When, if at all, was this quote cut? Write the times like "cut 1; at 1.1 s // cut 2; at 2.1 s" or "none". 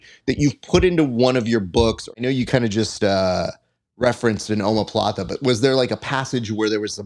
cut 1; at 2.1 s

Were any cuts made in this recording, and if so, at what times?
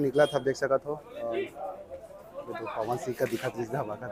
none

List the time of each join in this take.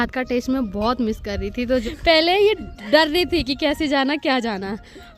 cut 1; at 1.9 s

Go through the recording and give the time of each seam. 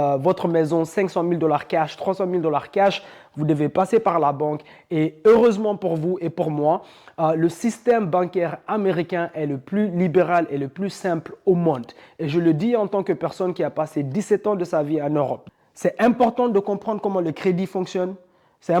cut 1; at 15.4 s

